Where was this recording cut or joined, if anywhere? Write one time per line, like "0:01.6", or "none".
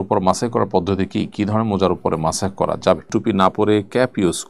0:03.1